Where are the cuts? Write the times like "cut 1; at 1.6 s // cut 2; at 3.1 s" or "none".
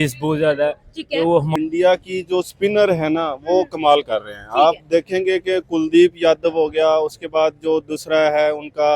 cut 1; at 1.5 s